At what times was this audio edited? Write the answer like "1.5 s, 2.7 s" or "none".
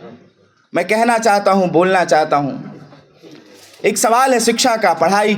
none

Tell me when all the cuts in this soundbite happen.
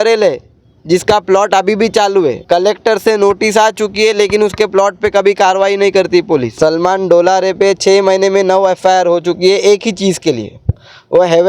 2.4 s, 6.5 s

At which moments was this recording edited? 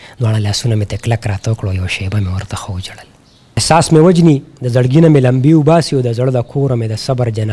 3.6 s

